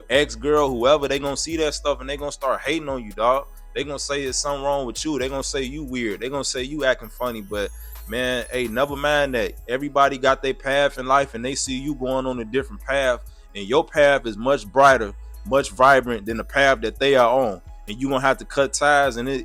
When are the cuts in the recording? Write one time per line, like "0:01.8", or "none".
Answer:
0:09.6

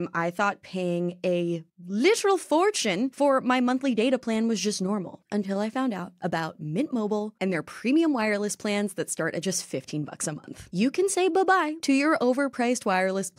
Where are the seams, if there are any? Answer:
0:03.1
0:05.1
0:10.7

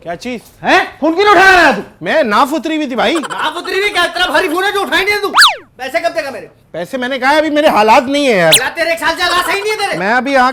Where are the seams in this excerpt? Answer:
none

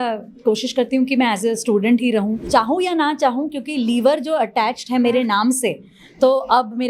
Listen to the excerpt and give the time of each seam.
0:02.4

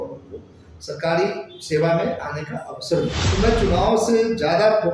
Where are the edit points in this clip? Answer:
0:03.2

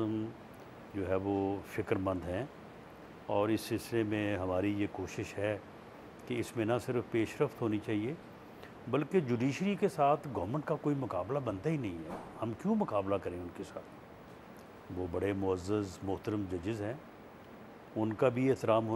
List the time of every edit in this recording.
none

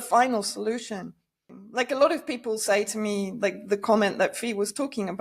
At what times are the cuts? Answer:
0:01.5

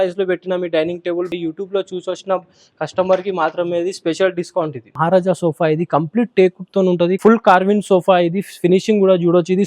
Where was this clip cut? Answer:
0:01.3
0:04.9
0:07.2

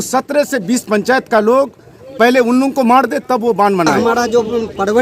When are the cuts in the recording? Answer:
0:03.9

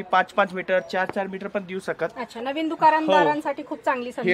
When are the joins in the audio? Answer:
none

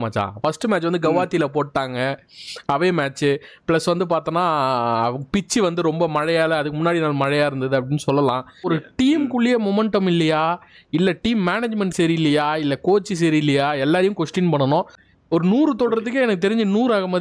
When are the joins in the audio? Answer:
0:08.7
0:15.0

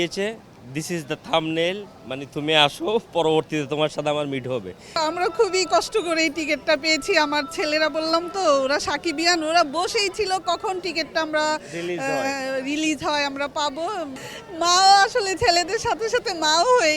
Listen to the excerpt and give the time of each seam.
0:05.0
0:14.2

